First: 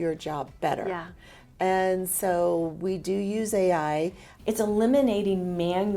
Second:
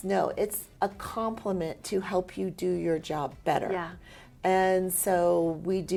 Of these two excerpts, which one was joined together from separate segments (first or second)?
first